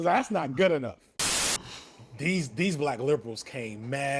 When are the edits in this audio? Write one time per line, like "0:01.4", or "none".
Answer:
0:01.2